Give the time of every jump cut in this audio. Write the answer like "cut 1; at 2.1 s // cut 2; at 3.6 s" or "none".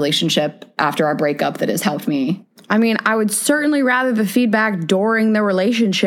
cut 1; at 2.5 s